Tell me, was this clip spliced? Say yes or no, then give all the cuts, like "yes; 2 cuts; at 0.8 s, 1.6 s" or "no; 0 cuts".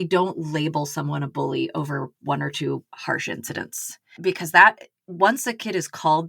yes; 1 cut; at 4.2 s